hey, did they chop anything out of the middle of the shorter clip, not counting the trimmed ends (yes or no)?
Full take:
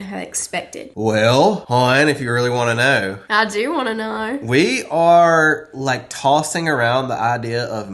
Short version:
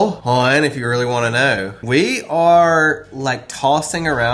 yes